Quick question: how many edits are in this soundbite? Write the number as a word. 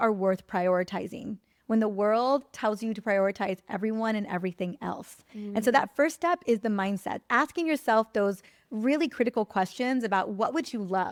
zero